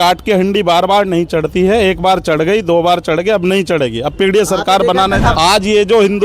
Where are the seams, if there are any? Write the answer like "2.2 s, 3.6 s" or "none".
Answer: 5.3 s